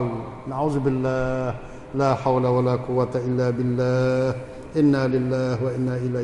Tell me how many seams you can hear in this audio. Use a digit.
0